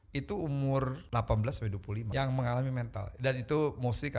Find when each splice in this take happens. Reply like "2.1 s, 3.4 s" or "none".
1.0 s, 2.1 s